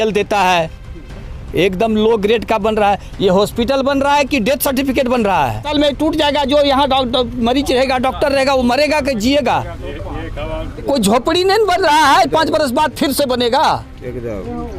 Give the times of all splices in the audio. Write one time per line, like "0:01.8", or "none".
0:05.6
0:10.8